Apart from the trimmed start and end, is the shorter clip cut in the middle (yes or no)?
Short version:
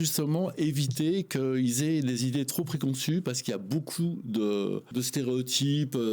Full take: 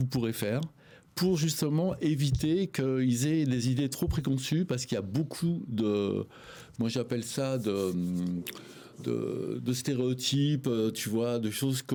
yes